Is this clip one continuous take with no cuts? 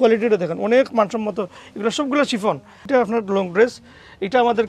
no; 1 cut; at 2.8 s

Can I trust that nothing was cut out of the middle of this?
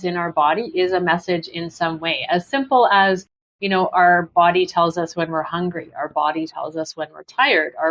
yes; 0 cuts

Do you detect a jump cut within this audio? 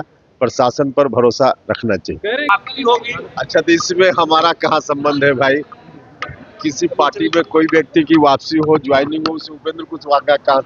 yes; 1 cut; at 2.4 s

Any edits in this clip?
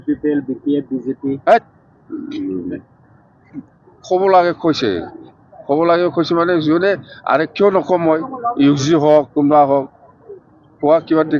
no; 0 cuts

